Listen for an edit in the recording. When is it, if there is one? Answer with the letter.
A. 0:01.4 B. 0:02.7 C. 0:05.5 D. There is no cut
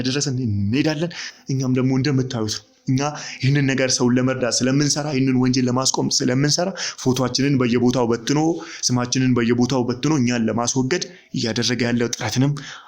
A